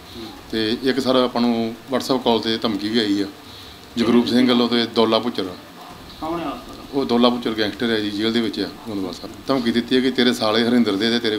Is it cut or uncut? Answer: cut